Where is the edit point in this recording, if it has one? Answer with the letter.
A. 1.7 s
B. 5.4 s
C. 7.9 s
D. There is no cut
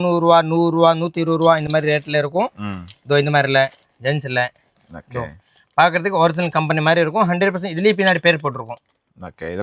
D